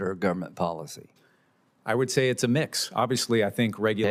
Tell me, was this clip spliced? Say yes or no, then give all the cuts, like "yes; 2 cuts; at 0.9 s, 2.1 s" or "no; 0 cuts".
no; 0 cuts